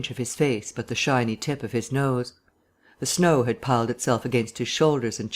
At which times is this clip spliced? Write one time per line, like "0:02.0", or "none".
0:03.6